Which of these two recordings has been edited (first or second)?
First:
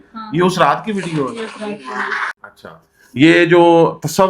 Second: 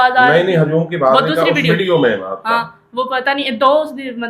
first